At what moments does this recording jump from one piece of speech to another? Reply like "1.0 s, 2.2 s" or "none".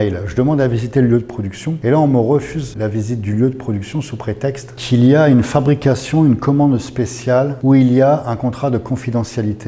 1.7 s, 2.6 s, 4.7 s, 7.5 s